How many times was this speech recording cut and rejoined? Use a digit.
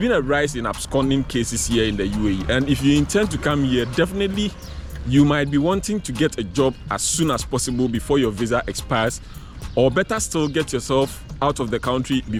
0